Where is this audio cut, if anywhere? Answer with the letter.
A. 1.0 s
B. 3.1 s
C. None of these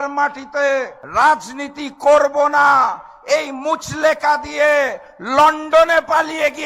A